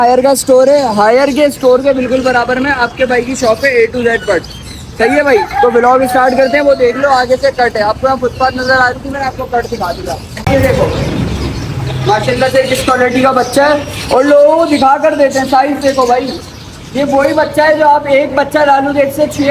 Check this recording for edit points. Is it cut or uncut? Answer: cut